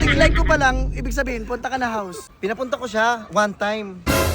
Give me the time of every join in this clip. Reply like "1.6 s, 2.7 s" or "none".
2.2 s